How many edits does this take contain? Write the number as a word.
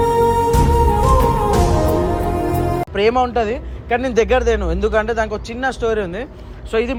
zero